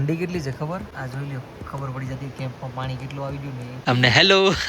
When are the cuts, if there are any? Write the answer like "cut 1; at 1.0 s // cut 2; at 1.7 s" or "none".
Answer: cut 1; at 0.9 s // cut 2; at 3.7 s